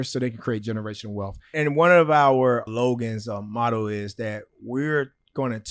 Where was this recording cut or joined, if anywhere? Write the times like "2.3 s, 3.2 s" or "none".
1.5 s, 2.7 s